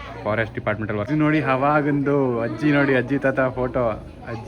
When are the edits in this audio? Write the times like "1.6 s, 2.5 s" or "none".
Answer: 1.1 s